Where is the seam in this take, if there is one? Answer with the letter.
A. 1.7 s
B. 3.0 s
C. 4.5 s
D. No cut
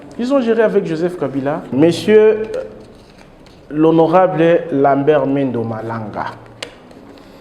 A